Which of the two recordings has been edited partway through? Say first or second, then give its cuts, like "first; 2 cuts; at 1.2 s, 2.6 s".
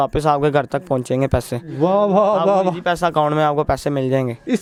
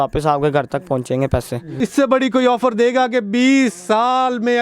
second; 1 cut; at 1.7 s